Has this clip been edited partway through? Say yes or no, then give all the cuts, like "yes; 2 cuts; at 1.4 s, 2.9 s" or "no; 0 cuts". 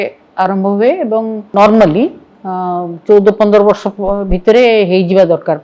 yes; 1 cut; at 1.5 s